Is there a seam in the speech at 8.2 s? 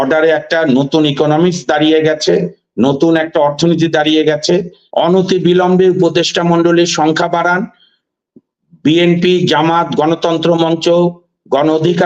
no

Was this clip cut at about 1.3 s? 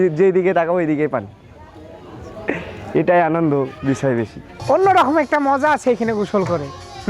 no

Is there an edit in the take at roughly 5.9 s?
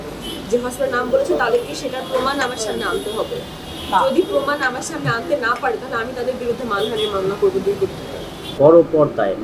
no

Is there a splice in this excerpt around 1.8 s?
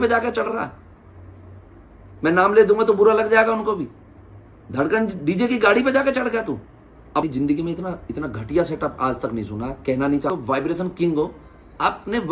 no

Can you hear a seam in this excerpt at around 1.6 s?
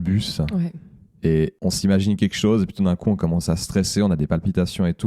yes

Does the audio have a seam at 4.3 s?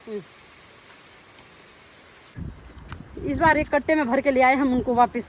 no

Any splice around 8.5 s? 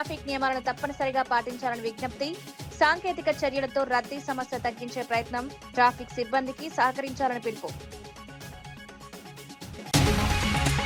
yes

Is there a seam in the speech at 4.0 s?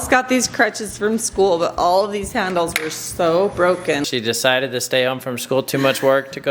yes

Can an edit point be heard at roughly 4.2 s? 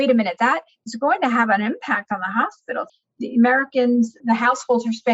yes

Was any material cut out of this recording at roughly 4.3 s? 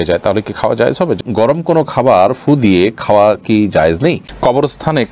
yes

